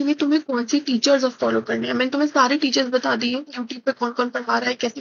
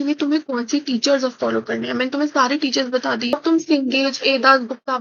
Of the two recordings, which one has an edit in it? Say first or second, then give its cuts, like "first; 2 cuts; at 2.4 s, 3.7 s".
second; 1 cut; at 3.3 s